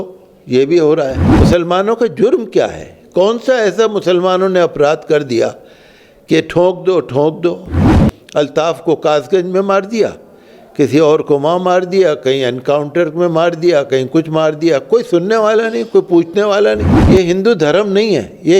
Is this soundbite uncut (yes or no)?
no